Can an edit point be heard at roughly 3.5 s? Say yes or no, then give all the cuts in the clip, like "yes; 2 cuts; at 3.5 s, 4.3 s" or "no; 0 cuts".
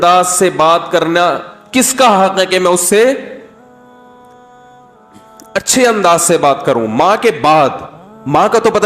yes; 2 cuts; at 3.5 s, 5.5 s